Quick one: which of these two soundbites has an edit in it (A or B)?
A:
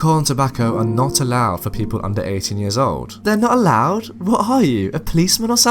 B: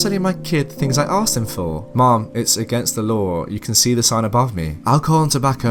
A